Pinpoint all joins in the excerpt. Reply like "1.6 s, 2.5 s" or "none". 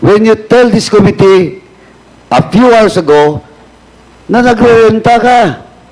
none